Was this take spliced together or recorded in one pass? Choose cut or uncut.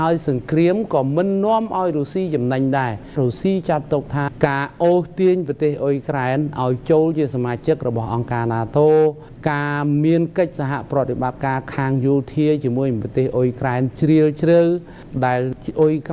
cut